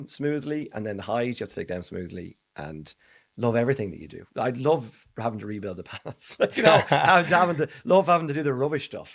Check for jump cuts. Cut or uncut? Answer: uncut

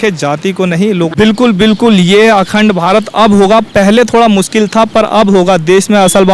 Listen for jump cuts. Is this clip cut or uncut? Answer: cut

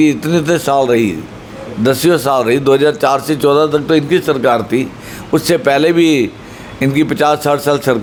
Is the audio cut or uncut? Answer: uncut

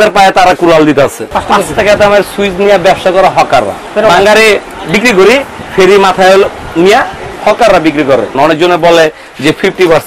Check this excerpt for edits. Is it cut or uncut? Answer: cut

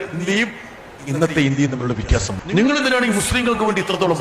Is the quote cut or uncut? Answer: cut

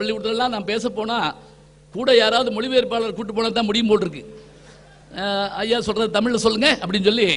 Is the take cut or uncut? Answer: uncut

